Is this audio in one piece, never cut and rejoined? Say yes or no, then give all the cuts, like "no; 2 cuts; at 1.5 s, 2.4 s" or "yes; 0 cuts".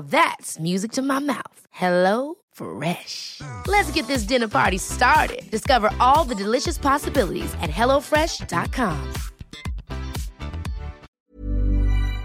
no; 1 cut; at 11.0 s